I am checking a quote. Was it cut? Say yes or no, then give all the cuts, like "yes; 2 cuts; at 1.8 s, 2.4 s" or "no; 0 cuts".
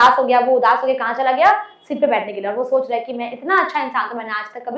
no; 0 cuts